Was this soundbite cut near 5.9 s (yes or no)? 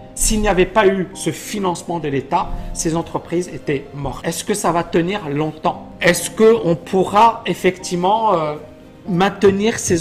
yes